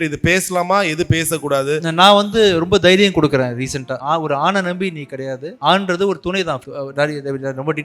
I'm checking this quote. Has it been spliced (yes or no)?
yes